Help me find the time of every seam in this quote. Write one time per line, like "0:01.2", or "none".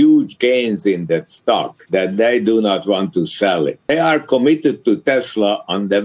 0:01.8
0:03.8